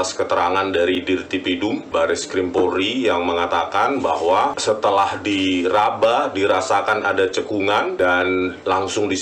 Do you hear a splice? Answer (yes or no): yes